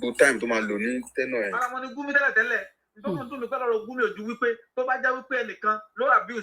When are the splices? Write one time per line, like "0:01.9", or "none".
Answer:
0:01.6